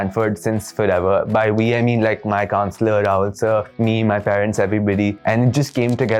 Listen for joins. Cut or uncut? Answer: uncut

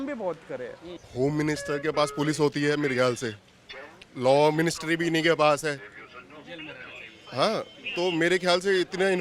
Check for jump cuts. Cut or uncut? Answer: cut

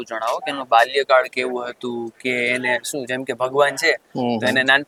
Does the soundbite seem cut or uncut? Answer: uncut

